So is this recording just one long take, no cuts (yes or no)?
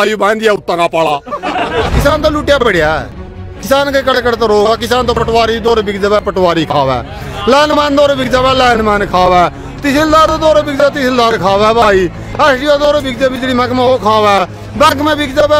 no